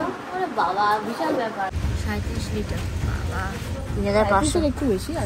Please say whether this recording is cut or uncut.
cut